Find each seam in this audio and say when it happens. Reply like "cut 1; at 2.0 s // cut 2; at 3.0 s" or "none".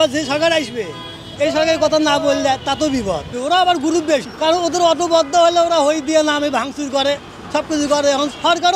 cut 1; at 3.4 s